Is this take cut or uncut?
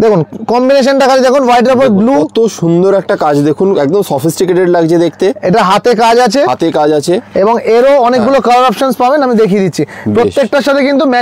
uncut